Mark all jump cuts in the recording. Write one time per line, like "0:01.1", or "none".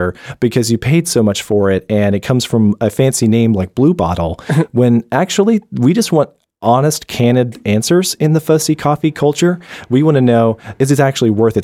0:10.7